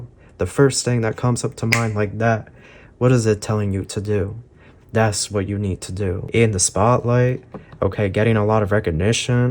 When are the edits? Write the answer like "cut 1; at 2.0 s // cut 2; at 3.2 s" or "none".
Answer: cut 1; at 6.2 s